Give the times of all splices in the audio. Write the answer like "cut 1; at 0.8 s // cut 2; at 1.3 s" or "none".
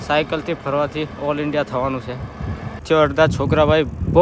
cut 1; at 2.8 s